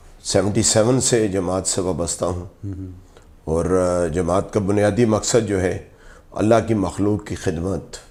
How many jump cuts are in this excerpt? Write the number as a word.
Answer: zero